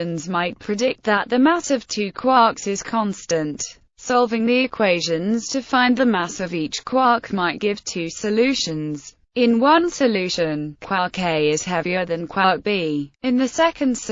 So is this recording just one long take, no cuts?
no; 1 cut; at 12.8 s

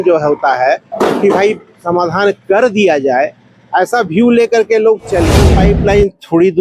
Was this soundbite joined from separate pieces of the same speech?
yes; 1 cut; at 5.4 s

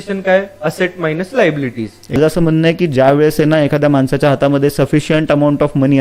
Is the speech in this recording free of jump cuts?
no; 1 cut; at 2.2 s

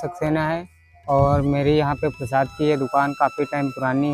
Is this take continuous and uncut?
yes; 0 cuts

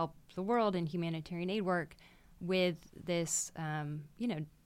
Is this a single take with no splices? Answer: yes; 0 cuts

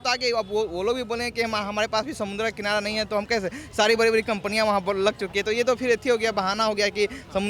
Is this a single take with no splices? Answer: yes; 0 cuts

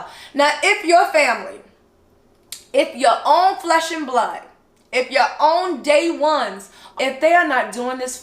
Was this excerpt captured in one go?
no; 1 cut; at 6.8 s

